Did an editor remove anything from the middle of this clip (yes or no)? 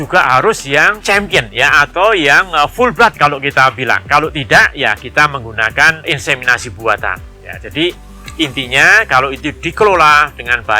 no